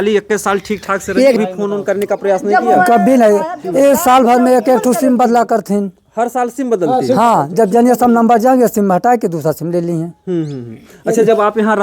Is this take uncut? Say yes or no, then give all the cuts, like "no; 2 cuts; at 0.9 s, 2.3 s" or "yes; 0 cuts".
no; 1 cut; at 1.4 s